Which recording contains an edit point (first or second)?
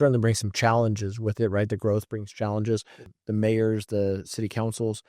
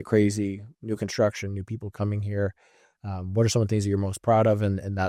first